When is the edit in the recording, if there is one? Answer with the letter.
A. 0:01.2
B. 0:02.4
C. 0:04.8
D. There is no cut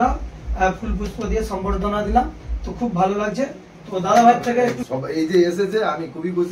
C